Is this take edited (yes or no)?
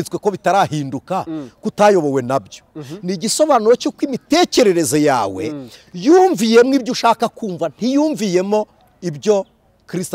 no